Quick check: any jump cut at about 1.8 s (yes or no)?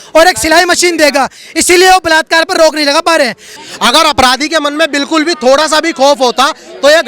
no